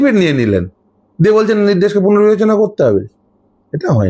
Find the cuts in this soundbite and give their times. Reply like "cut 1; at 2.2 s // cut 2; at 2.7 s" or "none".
none